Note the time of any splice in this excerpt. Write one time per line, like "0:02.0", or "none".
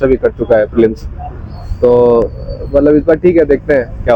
none